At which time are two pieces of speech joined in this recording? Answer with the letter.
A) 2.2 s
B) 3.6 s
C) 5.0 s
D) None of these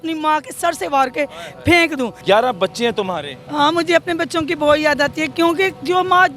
A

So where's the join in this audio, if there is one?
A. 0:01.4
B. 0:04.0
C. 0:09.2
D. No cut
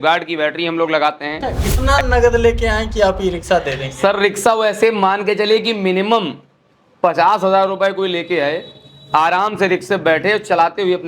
A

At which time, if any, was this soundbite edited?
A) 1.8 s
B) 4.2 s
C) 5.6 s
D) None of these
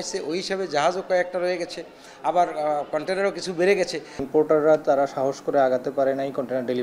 B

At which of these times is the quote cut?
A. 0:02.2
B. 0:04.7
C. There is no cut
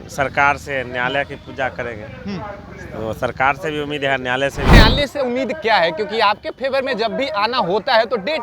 B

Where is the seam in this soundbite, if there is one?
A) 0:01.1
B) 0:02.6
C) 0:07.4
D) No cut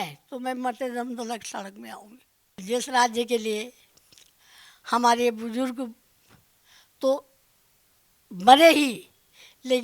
B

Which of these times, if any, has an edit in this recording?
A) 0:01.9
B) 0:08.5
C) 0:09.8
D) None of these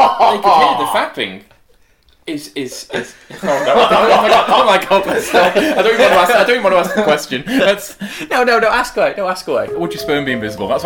C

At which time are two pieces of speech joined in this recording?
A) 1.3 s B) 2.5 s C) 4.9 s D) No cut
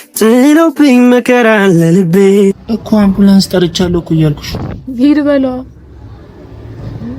B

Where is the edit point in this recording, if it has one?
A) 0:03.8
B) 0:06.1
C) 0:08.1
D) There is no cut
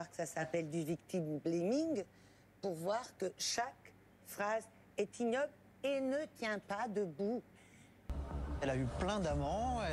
C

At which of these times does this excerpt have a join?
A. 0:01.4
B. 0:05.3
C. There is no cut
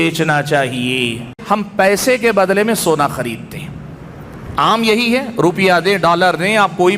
A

